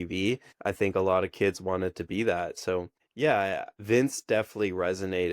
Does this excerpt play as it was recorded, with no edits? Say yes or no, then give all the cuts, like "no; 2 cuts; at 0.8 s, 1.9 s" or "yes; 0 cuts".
no; 1 cut; at 3.7 s